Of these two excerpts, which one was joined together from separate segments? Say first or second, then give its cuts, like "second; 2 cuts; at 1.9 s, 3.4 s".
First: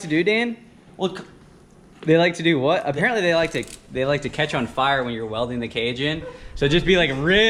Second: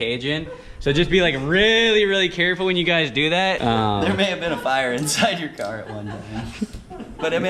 second; 1 cut; at 3.6 s